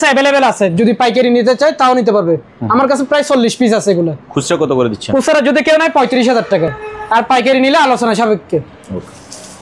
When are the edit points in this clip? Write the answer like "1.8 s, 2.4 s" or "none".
none